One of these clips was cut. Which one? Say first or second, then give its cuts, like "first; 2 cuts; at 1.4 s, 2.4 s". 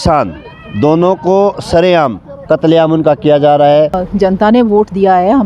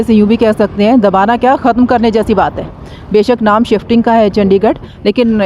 first; 1 cut; at 4.0 s